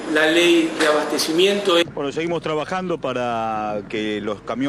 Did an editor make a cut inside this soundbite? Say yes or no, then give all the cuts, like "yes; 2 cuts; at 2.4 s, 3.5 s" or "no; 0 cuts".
yes; 1 cut; at 1.9 s